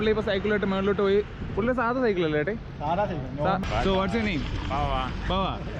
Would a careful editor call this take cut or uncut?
cut